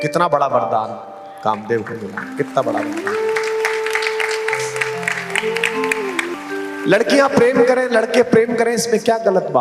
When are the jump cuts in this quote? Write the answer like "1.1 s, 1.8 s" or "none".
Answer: 6.4 s